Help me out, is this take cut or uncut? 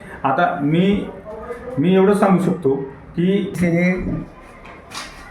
cut